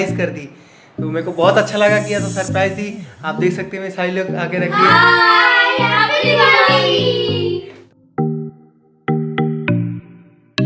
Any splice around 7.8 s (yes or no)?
yes